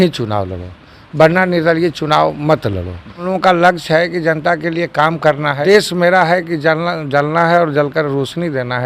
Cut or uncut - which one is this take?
cut